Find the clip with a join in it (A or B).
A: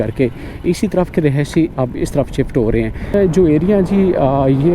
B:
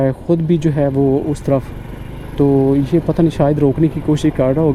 A